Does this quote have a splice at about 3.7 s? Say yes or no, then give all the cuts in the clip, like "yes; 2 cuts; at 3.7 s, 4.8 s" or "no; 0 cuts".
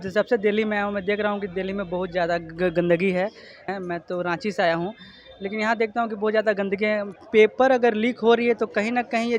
yes; 2 cuts; at 3.7 s, 7.1 s